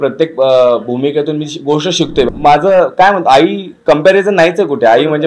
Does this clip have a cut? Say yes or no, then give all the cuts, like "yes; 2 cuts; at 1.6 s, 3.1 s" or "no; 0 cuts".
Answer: yes; 1 cut; at 2.3 s